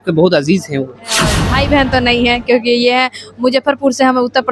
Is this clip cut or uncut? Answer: cut